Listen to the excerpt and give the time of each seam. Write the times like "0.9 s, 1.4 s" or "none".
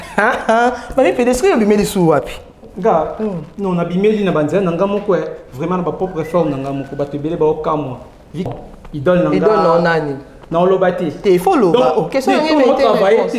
8.5 s